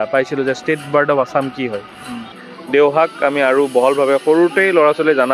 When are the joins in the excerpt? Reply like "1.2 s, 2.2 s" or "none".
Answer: 2.5 s